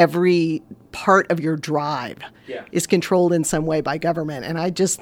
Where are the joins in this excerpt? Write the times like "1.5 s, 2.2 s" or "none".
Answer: none